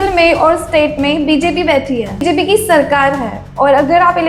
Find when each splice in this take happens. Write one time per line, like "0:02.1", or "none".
0:02.2